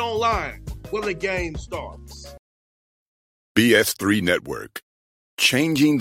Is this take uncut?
no; 1 cut; at 2.3 s

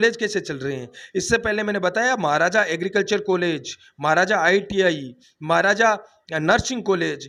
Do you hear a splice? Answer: no; 0 cuts

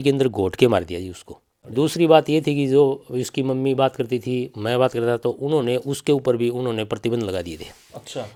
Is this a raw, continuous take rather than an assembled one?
yes; 0 cuts

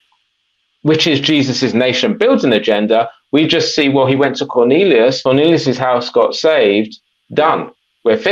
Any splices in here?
yes; 1 cut; at 5.2 s

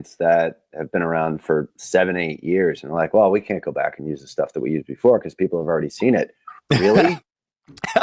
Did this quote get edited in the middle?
no; 0 cuts

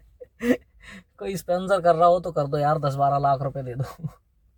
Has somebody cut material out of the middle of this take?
no; 0 cuts

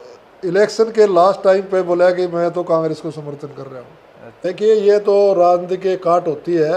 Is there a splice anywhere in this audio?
yes; 1 cut; at 4.4 s

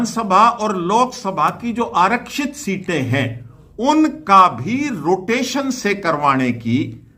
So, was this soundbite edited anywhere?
no; 0 cuts

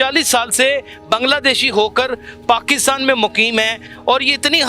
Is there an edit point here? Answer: no; 0 cuts

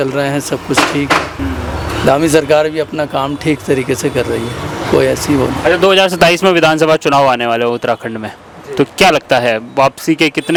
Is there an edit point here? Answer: no; 0 cuts

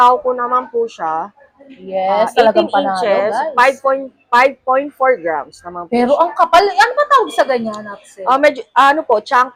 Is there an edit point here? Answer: no; 0 cuts

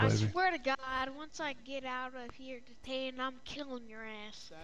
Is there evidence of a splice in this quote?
no; 0 cuts

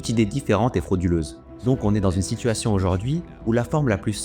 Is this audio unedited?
no; 1 cut; at 1.5 s

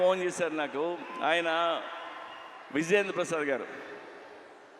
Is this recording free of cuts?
yes; 0 cuts

